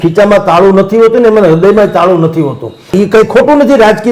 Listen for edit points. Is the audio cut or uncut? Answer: cut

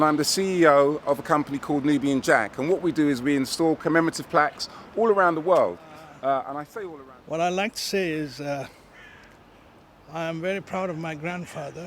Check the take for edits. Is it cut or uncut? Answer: cut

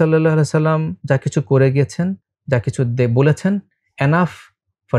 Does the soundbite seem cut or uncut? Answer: cut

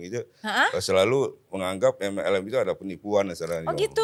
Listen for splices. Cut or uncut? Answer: uncut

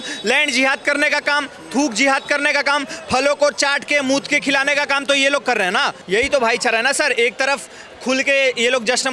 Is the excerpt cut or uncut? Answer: cut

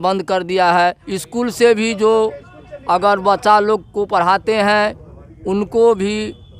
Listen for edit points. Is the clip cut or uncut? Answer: cut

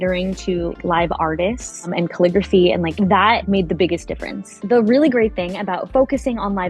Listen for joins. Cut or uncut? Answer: cut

